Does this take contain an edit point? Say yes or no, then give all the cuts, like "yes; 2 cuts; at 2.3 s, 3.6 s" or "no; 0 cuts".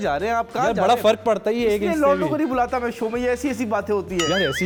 no; 0 cuts